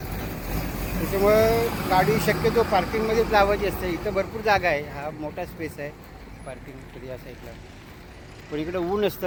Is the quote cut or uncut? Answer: uncut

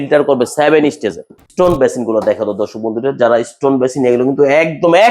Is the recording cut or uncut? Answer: cut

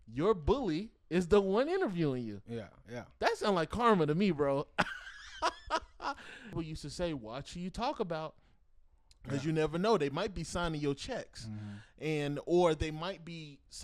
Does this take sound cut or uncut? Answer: cut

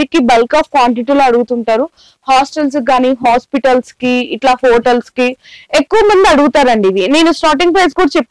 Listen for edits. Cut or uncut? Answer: uncut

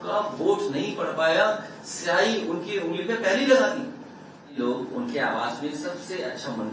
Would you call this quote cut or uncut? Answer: cut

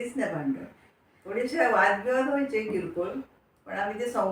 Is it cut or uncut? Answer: uncut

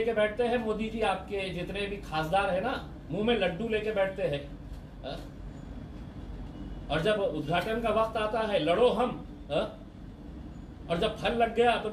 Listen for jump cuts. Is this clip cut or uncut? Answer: uncut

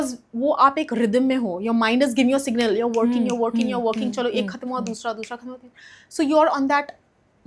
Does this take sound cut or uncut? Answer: uncut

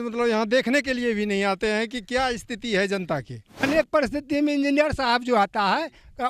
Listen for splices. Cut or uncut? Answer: cut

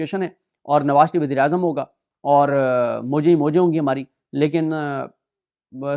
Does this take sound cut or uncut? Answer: uncut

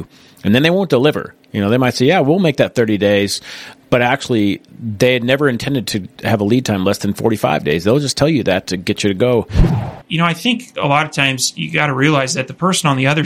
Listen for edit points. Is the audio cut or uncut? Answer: cut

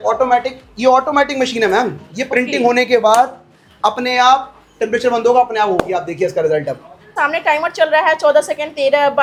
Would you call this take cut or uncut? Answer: uncut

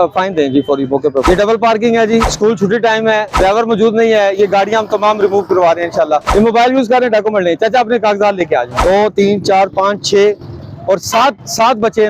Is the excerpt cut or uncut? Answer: cut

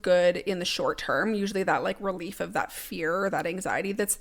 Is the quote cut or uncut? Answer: uncut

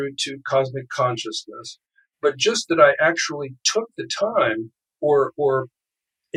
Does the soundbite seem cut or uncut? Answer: uncut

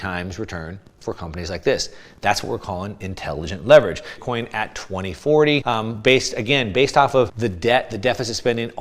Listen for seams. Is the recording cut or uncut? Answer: cut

